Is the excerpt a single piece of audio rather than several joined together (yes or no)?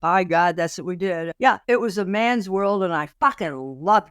no